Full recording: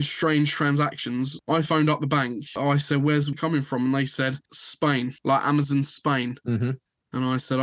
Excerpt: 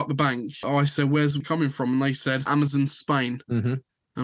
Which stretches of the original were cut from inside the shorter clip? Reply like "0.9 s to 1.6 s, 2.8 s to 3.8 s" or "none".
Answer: 4.4 s to 5.4 s